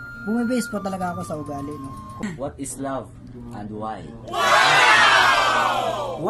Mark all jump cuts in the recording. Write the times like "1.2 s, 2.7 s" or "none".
2.2 s